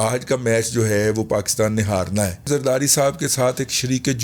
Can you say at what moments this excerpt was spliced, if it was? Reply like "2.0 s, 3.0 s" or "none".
2.5 s